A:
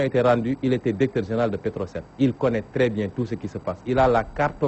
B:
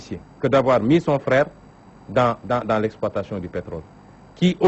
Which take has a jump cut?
B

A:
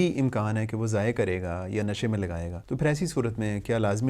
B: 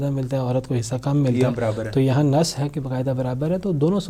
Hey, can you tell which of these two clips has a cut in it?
A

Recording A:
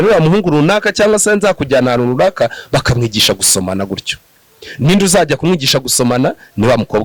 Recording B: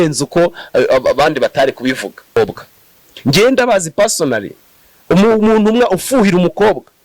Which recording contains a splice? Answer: B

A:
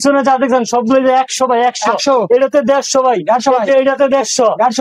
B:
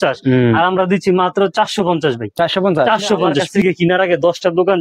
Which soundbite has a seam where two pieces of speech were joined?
B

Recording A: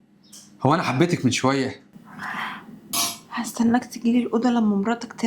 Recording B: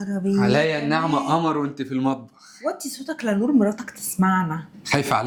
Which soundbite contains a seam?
A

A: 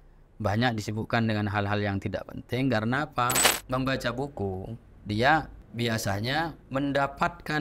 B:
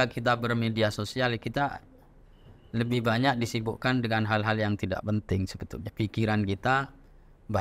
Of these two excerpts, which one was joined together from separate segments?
A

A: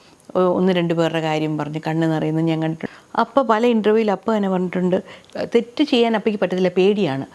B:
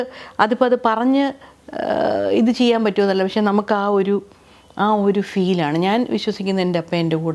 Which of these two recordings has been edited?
A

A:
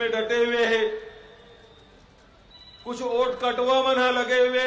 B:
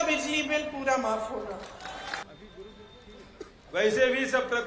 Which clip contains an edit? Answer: B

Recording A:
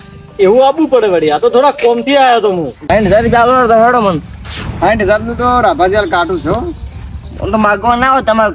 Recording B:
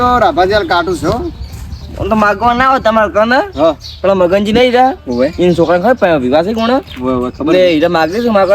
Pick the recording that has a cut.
A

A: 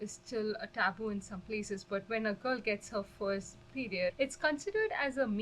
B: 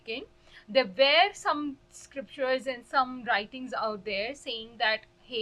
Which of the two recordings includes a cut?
A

